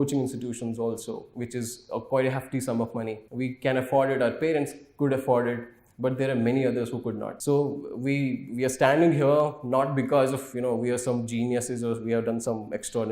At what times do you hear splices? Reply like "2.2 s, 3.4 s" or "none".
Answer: 3.2 s, 7.3 s